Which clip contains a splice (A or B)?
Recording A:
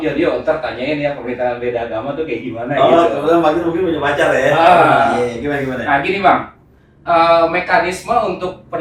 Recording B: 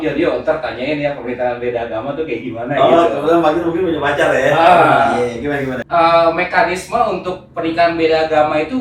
B